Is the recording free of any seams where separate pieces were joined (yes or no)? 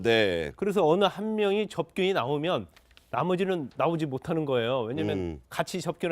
no